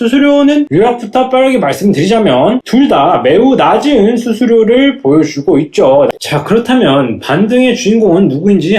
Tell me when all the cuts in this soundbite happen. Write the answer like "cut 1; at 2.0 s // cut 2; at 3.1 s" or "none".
cut 1; at 6.1 s